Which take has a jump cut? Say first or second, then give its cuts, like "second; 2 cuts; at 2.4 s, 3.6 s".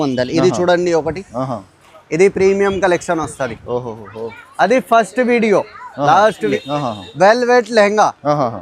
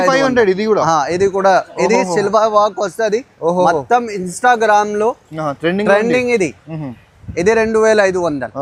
first; 1 cut; at 6.5 s